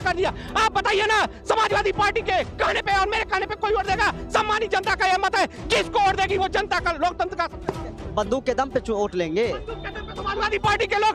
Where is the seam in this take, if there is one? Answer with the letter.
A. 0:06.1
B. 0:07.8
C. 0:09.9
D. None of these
D